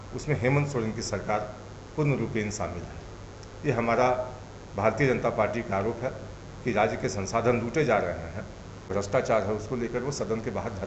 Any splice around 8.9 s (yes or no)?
yes